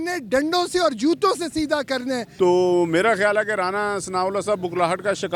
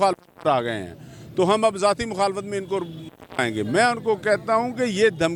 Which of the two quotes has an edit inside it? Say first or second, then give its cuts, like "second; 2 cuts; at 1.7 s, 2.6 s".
first; 1 cut; at 2.3 s